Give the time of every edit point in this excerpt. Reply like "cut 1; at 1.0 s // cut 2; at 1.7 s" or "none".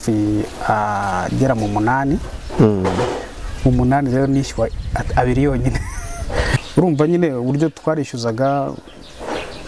cut 1; at 6.6 s